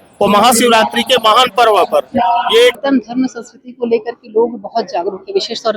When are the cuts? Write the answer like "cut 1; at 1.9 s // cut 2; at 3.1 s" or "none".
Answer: cut 1; at 2.7 s